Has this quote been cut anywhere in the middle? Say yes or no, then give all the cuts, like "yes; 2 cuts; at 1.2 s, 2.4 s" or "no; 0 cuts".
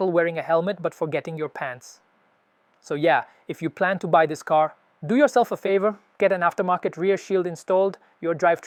no; 0 cuts